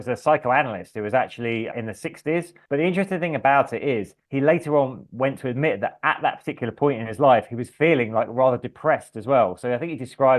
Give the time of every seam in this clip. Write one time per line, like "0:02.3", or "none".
0:02.7